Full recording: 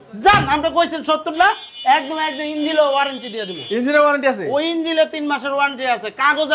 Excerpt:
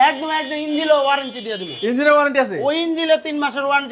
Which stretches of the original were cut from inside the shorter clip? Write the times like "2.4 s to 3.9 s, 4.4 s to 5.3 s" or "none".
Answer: none

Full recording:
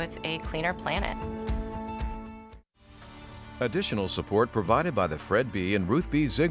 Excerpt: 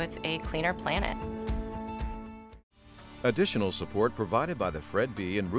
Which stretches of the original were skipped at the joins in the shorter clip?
3.0 s to 3.4 s

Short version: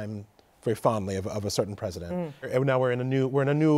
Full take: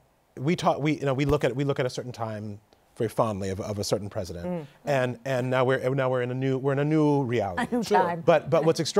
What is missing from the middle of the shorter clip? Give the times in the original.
4.8 s to 5.8 s

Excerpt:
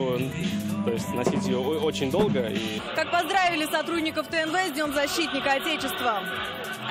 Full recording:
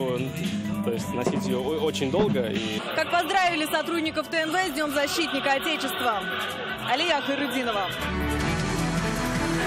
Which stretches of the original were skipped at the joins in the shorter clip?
none

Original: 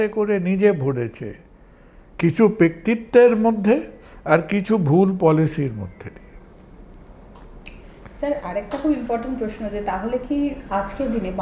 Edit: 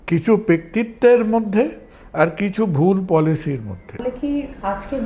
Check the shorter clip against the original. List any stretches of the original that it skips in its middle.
6.1 s to 10.1 s

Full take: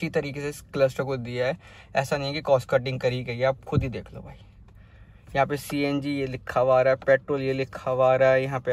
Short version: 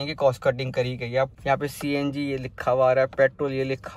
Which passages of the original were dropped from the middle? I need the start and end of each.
3.6 s to 5.2 s

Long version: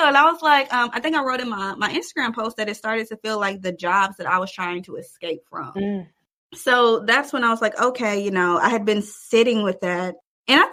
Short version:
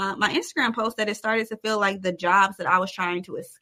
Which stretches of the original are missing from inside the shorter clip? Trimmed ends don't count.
none

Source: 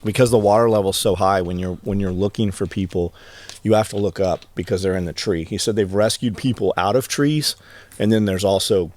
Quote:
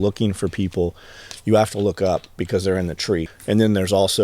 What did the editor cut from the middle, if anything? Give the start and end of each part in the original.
5.5 s to 7.8 s

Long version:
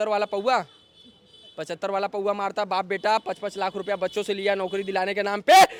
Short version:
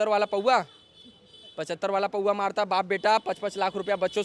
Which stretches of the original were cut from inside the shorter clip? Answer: none

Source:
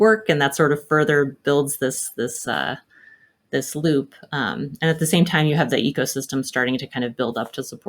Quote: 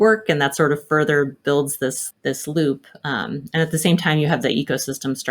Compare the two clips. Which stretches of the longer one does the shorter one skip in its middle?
2.0 s to 3.3 s

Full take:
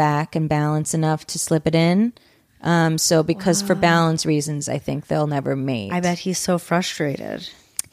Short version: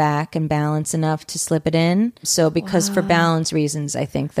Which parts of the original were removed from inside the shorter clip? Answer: 2.3 s to 3.0 s

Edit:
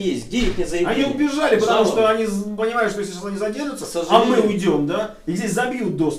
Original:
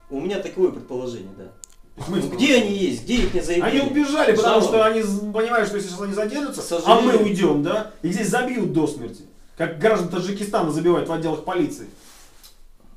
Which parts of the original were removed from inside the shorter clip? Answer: none

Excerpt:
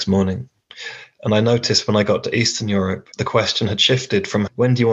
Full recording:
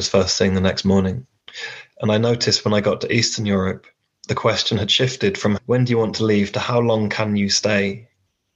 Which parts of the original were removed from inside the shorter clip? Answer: 3.9 s to 4.2 s

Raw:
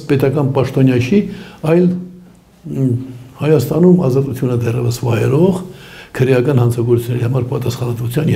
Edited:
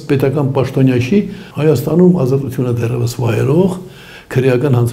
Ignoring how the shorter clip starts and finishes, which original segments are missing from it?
1.4 s to 3.3 s

